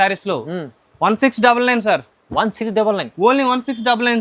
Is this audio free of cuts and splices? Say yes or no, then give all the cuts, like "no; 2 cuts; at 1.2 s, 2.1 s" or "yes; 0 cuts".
yes; 0 cuts